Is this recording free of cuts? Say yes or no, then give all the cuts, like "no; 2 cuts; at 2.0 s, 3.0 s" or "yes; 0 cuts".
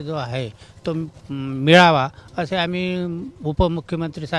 yes; 0 cuts